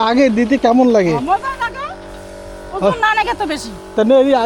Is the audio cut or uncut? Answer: uncut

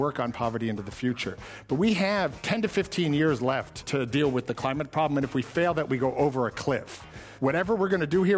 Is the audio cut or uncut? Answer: cut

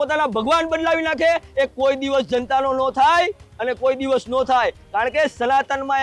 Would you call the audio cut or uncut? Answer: uncut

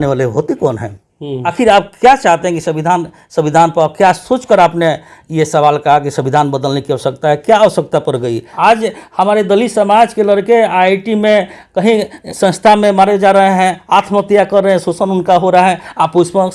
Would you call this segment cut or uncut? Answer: cut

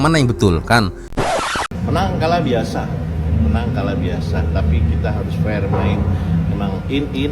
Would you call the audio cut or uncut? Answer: cut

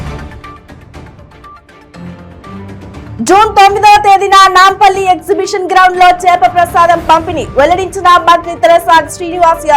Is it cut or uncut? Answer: uncut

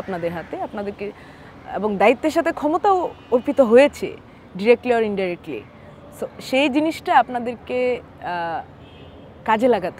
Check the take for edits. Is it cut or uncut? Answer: uncut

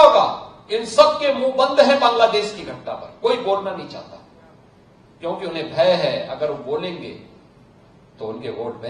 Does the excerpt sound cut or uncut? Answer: uncut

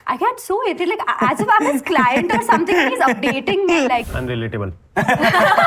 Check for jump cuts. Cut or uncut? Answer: cut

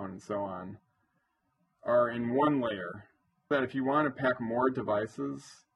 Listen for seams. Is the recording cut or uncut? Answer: cut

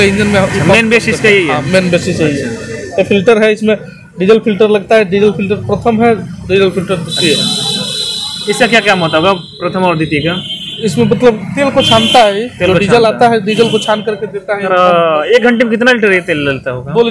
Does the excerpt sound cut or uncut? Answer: uncut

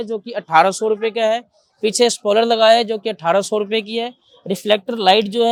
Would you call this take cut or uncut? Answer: uncut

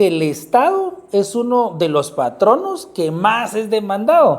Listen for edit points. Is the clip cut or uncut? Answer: uncut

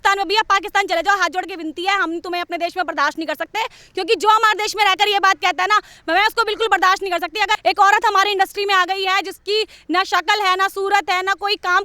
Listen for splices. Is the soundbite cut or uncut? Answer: cut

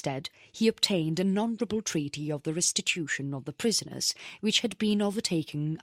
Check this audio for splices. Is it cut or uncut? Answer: cut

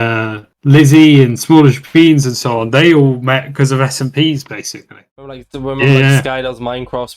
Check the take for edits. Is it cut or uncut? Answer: cut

